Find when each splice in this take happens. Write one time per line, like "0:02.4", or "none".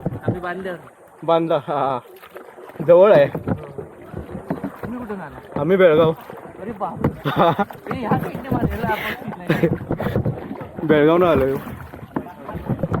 none